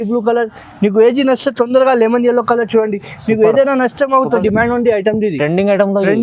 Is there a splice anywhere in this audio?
yes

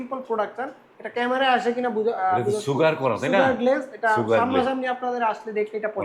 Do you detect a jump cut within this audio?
no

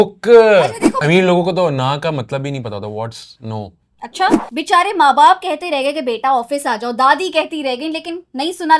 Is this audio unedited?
no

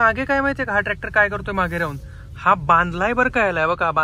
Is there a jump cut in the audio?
no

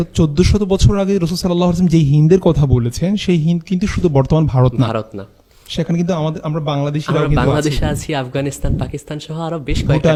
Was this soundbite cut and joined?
no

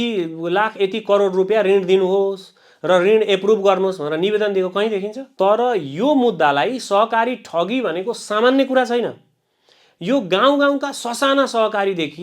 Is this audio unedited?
no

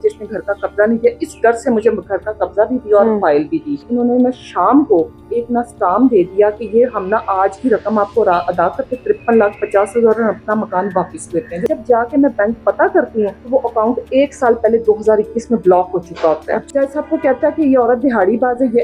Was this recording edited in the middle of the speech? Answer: yes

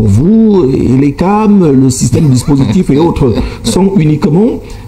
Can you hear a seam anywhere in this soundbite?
no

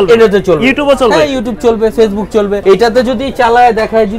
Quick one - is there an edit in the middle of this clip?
yes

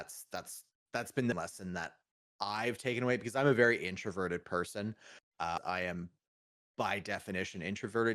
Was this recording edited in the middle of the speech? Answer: yes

